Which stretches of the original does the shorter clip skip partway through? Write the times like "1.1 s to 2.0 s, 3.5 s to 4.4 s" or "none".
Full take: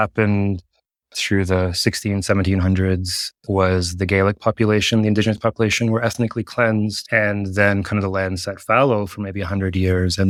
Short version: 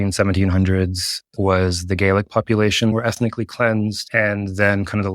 5.0 s to 5.9 s